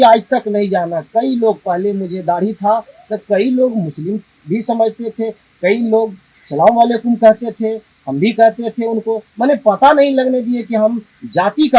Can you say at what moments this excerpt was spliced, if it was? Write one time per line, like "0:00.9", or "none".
none